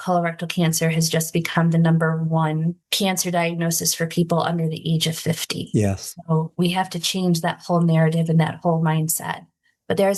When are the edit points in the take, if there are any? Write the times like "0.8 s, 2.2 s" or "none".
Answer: none